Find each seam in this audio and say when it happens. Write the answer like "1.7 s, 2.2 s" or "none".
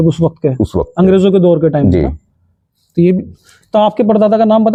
none